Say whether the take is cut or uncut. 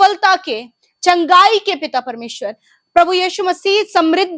uncut